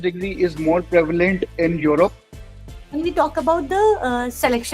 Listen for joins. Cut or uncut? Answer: cut